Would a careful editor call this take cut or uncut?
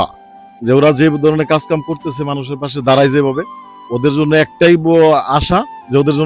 uncut